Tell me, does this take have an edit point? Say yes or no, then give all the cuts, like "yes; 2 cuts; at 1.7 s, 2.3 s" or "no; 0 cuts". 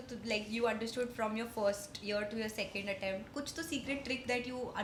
no; 0 cuts